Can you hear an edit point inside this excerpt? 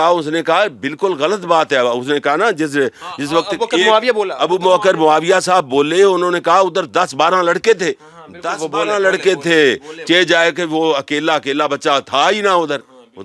no; 0 cuts

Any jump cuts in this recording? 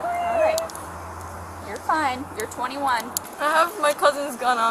yes; 1 cut; at 3.2 s

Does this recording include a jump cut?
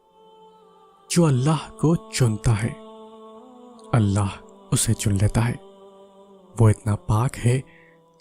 yes; 1 cut; at 1.1 s

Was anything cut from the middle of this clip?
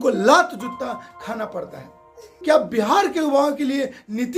yes; 1 cut; at 2.3 s

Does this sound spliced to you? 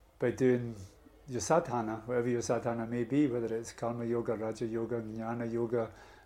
no; 0 cuts

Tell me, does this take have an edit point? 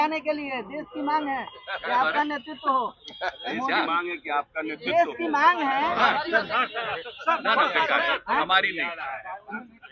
no; 0 cuts

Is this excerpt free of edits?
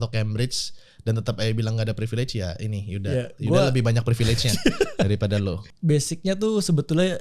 no; 1 cut; at 5.7 s

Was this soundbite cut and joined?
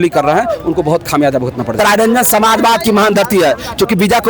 yes; 1 cut; at 1.7 s

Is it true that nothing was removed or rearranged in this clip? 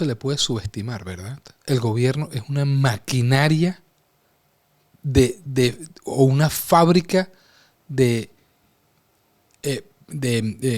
yes; 0 cuts

